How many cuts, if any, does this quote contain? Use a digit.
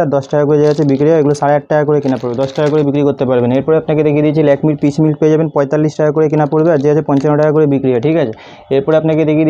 0